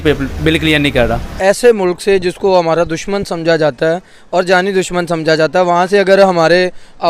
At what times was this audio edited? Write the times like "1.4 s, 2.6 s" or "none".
1.3 s